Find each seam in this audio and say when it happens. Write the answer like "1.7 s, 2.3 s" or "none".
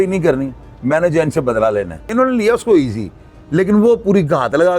2.1 s